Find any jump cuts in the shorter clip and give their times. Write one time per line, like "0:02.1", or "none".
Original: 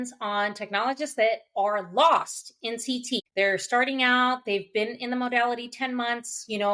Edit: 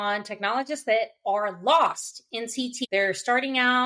0:02.8